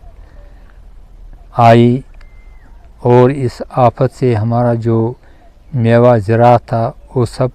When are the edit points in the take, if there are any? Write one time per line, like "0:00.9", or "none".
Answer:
none